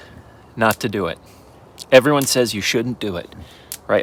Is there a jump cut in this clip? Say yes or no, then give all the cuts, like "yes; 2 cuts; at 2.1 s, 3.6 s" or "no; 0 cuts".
no; 0 cuts